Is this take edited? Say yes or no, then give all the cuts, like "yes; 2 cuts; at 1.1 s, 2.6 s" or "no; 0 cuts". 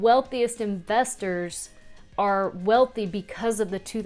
no; 0 cuts